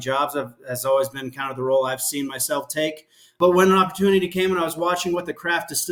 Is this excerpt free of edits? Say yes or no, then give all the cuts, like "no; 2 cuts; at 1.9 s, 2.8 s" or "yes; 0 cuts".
yes; 0 cuts